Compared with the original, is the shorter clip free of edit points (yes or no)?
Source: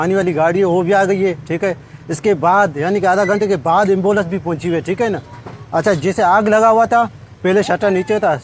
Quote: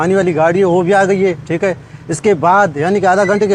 yes